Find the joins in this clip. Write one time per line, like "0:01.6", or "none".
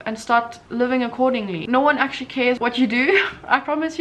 0:01.6
0:02.6